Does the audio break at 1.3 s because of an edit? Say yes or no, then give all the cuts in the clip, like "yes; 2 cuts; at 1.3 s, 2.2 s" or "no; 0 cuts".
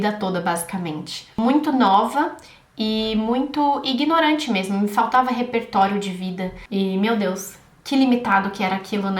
yes; 2 cuts; at 1.3 s, 6.6 s